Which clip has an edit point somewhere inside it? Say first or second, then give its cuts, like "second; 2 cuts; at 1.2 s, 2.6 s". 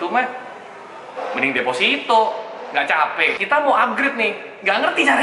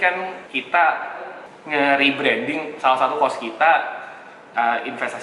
first; 1 cut; at 3.4 s